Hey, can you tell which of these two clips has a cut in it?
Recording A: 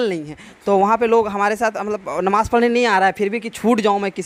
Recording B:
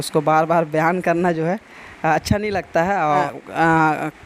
B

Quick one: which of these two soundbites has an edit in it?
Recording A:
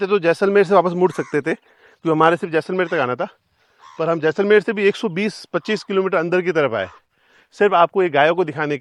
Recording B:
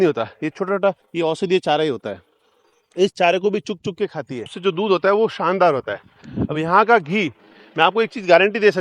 B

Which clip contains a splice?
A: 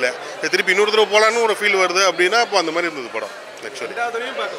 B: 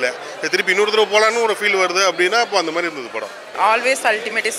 B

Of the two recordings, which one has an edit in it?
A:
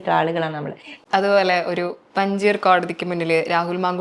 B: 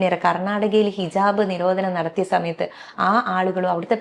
A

